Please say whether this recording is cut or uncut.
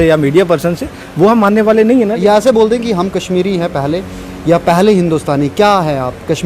cut